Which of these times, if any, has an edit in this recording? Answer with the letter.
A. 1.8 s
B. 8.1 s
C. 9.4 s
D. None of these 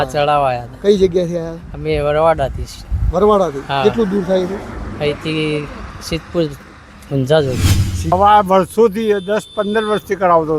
B